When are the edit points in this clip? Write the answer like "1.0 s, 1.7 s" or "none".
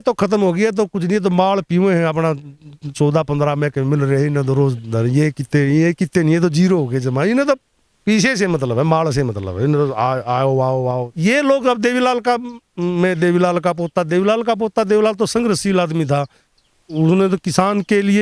10.9 s